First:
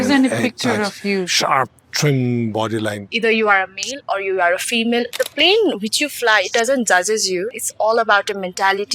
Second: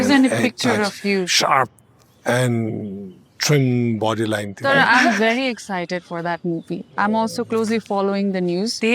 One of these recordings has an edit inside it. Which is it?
first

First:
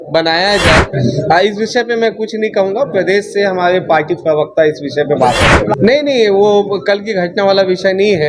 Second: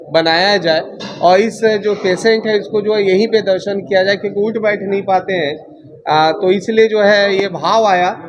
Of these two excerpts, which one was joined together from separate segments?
first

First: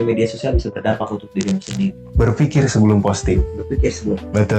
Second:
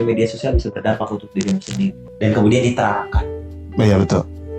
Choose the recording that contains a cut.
second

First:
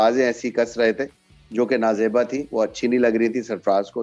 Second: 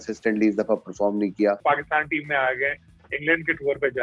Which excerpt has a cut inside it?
second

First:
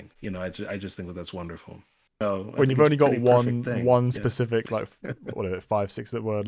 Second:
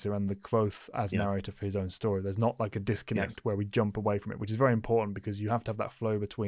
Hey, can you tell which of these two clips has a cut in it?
first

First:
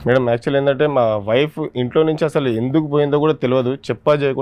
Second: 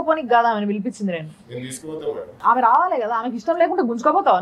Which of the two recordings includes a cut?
second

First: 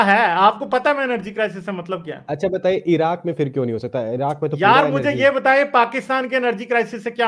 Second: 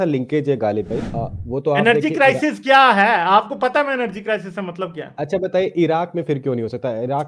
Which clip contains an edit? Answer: second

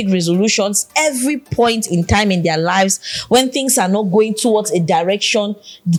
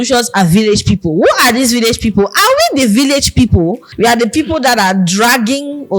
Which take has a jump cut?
second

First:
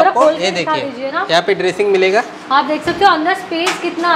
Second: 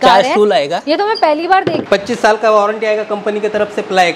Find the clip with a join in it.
second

